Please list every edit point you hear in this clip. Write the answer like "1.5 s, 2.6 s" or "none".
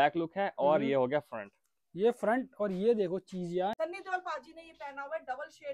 3.7 s